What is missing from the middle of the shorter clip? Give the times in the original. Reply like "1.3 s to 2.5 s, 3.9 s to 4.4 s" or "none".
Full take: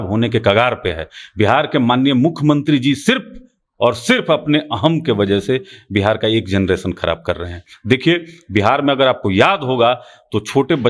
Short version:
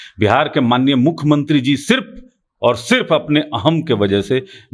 none